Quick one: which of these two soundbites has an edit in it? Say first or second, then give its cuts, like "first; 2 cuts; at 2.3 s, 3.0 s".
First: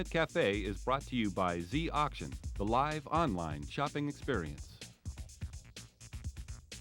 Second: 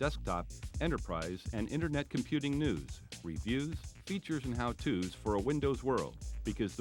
first; 1 cut; at 4.5 s